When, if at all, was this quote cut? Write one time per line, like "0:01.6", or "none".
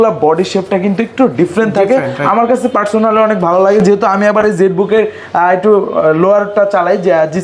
none